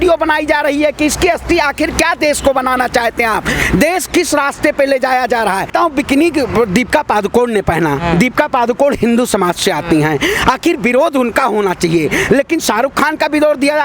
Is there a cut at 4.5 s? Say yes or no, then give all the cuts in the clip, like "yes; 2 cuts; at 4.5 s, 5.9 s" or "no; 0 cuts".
no; 1 cut; at 5.7 s